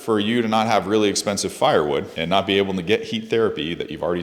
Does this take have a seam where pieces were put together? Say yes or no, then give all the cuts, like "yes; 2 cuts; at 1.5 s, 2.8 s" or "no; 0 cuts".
yes; 1 cut; at 2.1 s